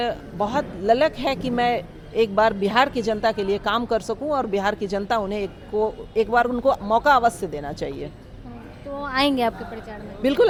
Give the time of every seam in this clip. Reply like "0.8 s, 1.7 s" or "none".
none

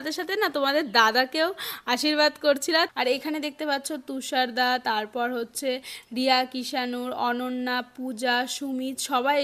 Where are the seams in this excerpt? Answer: 2.9 s

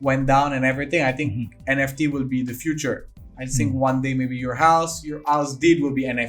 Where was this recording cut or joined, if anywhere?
none

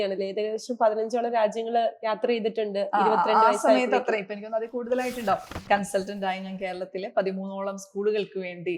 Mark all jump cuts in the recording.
5.5 s

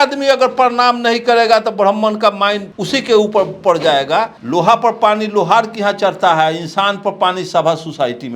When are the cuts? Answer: 2.7 s, 4.4 s

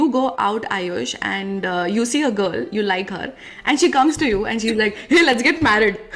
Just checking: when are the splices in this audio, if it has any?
none

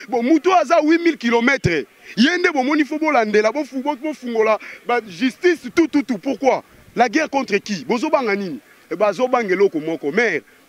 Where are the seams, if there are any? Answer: none

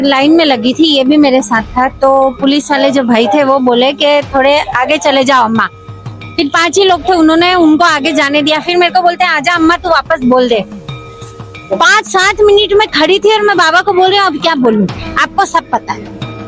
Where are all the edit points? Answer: none

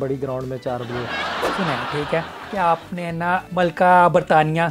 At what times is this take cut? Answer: 1.5 s, 3.5 s

